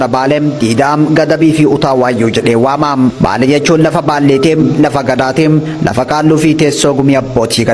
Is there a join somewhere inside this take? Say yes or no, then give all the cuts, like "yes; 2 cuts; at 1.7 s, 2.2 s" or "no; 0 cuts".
no; 0 cuts